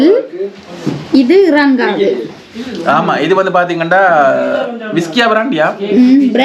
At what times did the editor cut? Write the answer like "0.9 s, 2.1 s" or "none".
none